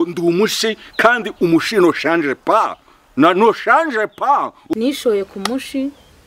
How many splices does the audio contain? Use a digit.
1